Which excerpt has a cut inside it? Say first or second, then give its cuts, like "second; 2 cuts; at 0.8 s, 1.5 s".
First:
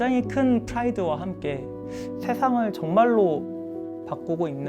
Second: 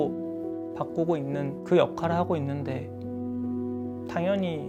first; 1 cut; at 2.0 s